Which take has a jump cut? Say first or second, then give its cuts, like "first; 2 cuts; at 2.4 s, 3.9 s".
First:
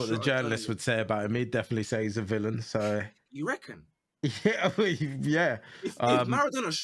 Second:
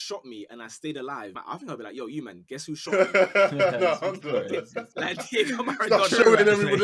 second; 1 cut; at 1.3 s